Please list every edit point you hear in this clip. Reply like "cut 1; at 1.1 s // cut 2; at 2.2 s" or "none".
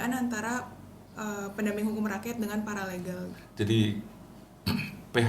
cut 1; at 3.4 s